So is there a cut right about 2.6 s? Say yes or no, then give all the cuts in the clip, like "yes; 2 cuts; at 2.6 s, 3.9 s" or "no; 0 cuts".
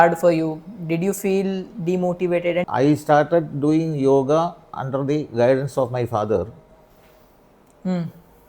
yes; 1 cut; at 2.6 s